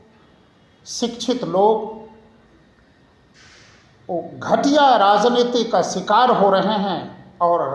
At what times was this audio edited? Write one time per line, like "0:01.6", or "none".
none